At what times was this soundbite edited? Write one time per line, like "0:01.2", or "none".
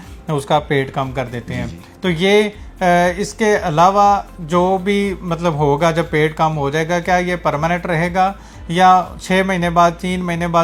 none